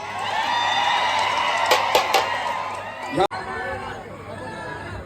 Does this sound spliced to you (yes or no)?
yes